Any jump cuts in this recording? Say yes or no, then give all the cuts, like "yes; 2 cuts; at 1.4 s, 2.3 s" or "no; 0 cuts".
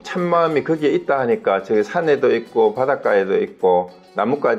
no; 0 cuts